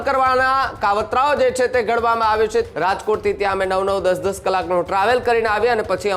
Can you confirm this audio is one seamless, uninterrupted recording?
no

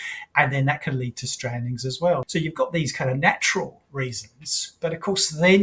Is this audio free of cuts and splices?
no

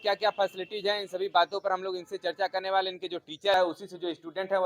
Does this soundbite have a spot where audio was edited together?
yes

